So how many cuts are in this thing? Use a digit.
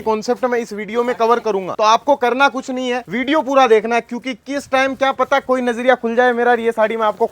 2